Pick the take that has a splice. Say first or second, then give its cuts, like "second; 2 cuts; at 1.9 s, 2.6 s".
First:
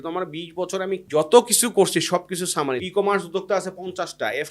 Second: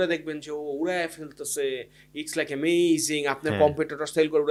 first; 2 cuts; at 1.0 s, 2.8 s